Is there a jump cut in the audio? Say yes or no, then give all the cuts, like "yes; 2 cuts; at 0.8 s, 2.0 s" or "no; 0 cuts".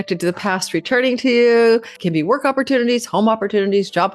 yes; 1 cut; at 1.9 s